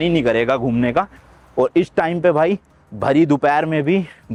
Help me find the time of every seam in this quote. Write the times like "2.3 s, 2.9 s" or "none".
none